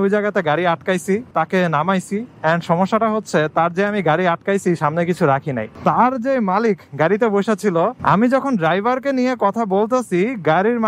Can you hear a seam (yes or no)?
yes